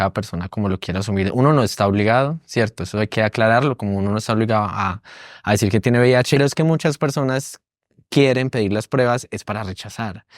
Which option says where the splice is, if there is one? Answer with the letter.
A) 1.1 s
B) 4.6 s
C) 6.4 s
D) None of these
C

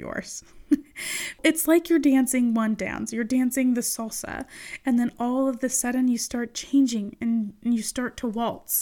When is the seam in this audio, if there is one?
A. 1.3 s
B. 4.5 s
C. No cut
A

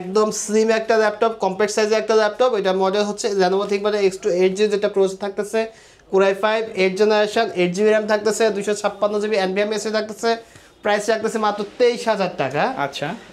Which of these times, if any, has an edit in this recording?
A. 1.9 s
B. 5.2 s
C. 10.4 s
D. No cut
D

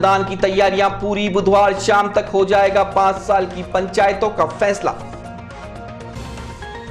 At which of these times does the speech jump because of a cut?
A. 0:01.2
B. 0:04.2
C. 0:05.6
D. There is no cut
D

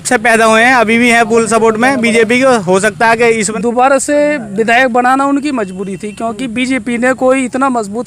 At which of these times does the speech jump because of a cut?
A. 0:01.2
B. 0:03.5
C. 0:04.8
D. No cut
B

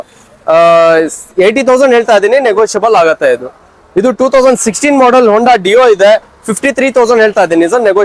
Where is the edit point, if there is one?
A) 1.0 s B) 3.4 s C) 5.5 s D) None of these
D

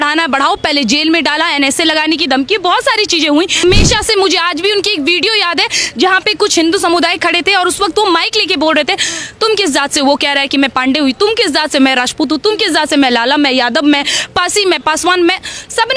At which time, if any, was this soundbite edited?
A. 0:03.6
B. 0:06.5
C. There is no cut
A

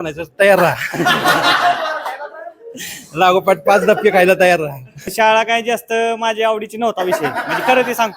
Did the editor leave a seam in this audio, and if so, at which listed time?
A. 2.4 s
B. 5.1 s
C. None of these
B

